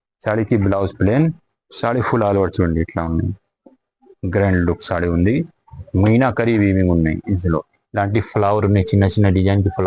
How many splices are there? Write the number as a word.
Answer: zero